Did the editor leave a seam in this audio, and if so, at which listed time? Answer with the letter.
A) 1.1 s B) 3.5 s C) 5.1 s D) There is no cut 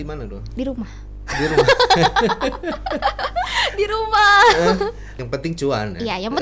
C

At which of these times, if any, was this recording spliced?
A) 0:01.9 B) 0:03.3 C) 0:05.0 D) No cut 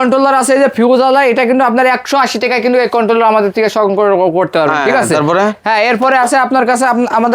D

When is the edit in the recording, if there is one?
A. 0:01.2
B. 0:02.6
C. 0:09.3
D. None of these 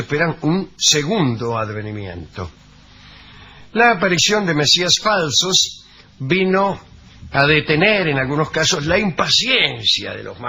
C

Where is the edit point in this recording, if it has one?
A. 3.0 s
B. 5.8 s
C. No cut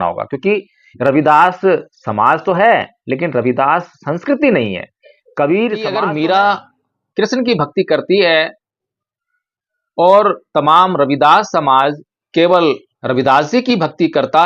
B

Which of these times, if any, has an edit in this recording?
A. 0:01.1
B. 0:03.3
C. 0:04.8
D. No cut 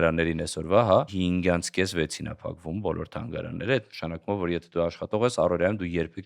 A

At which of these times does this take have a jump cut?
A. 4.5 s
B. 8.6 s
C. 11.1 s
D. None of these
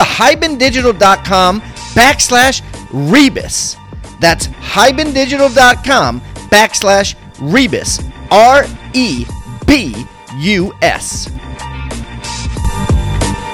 C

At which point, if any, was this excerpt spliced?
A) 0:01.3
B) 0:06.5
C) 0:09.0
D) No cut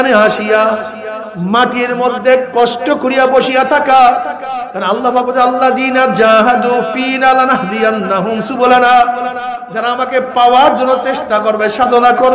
D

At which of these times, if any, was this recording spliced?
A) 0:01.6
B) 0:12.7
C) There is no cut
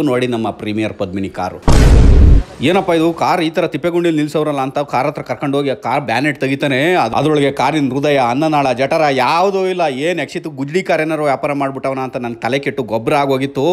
A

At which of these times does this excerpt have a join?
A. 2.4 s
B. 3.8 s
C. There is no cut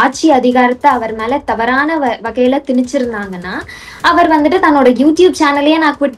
C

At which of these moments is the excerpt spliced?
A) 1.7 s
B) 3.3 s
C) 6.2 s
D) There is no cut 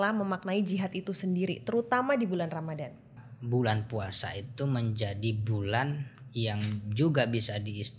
B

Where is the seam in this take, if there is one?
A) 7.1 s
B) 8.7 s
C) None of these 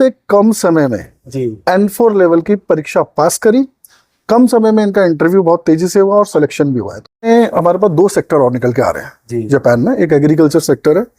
A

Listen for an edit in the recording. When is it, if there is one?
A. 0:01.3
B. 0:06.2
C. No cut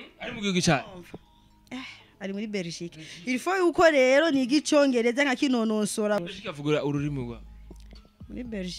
B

